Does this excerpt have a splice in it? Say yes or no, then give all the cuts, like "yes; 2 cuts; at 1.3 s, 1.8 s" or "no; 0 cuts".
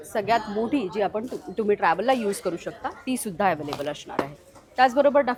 no; 0 cuts